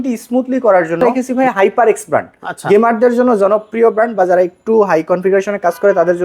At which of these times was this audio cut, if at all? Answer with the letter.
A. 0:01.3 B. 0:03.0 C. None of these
A